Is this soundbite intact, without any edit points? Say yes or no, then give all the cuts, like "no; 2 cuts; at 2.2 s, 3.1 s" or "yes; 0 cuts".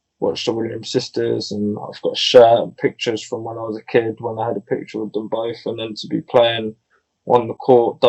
yes; 0 cuts